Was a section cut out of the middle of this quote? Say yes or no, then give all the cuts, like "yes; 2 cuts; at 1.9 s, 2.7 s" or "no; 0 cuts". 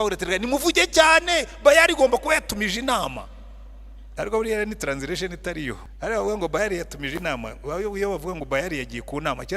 yes; 1 cut; at 5.9 s